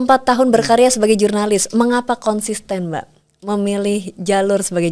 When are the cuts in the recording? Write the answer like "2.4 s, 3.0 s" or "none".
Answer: none